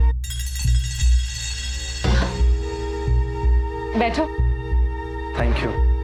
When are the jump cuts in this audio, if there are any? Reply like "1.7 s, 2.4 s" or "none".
none